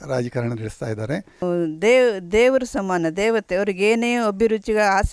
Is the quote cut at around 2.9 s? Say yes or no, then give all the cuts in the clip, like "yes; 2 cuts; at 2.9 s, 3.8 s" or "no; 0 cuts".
no; 1 cut; at 1.4 s